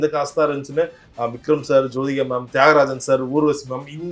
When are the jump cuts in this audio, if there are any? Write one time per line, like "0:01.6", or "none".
none

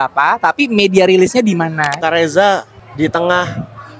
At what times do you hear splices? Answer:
0:02.0
0:02.8

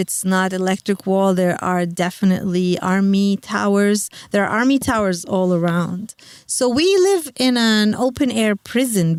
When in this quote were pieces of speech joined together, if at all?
none

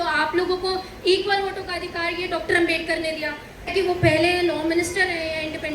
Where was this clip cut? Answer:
0:03.7

